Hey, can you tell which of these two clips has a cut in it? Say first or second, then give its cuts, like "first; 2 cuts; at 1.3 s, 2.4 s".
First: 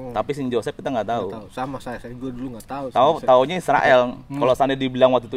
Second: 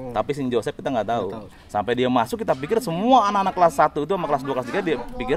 second; 1 cut; at 1.4 s